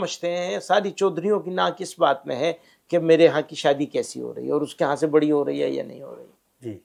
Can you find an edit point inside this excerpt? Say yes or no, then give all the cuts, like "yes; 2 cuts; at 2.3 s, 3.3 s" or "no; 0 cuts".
no; 0 cuts